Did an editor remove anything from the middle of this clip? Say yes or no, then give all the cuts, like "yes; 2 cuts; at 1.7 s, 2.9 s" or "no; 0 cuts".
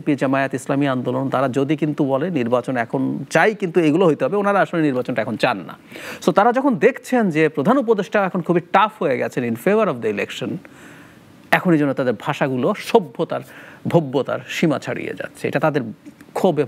no; 0 cuts